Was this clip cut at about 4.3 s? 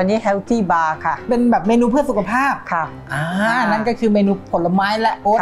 no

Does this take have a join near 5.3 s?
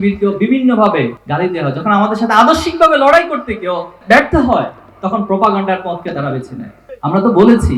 no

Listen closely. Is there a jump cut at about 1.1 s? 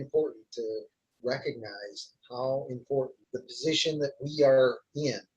no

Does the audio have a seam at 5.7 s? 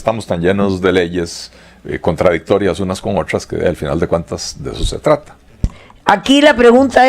yes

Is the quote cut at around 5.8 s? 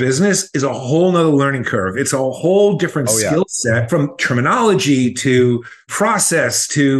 no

